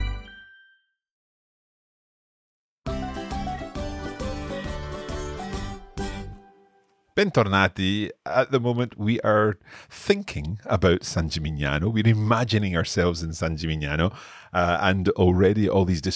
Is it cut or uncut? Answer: uncut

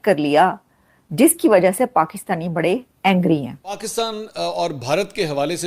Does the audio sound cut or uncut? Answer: cut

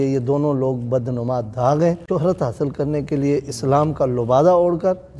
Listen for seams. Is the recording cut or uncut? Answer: cut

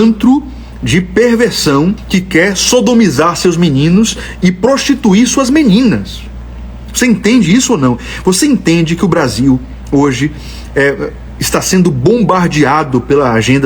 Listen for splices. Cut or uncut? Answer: cut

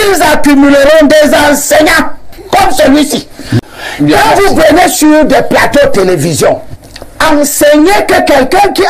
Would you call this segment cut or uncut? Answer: cut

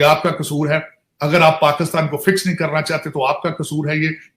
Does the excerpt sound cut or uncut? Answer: uncut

